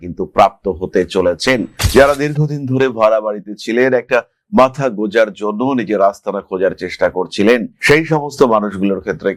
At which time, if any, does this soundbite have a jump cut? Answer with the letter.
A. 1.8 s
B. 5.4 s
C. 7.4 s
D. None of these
A